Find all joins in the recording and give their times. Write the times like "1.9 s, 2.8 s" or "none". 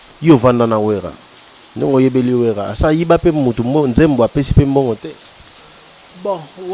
none